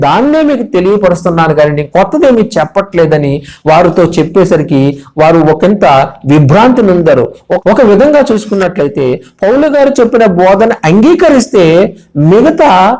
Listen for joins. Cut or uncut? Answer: cut